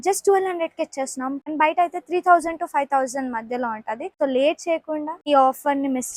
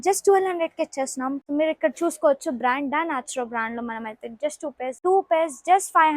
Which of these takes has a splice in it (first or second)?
second